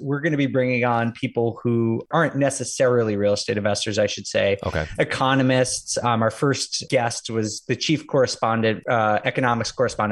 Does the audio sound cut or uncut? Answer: cut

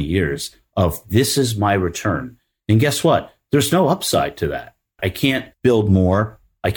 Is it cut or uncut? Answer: cut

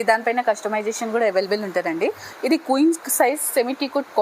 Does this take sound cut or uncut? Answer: cut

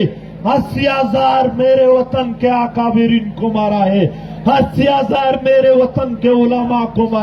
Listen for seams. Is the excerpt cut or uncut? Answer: uncut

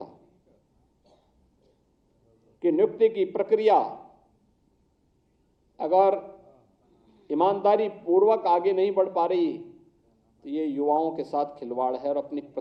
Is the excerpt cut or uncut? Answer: uncut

